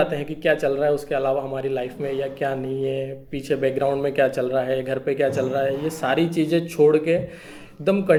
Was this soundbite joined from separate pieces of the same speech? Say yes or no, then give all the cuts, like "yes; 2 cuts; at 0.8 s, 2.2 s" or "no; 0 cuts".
no; 0 cuts